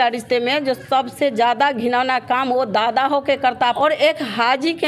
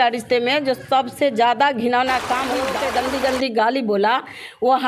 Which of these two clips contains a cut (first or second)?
second